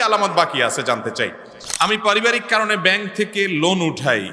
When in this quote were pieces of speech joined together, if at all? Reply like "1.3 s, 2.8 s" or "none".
1.6 s

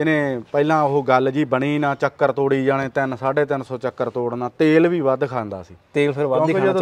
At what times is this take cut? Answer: none

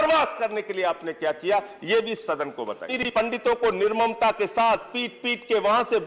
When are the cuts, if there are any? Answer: 3.1 s

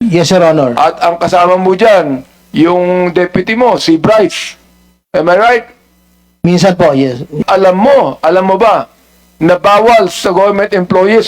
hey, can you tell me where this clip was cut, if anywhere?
7.4 s

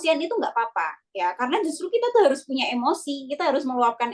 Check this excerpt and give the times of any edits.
none

